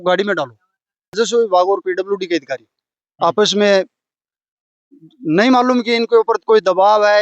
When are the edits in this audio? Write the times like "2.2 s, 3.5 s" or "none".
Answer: 1.2 s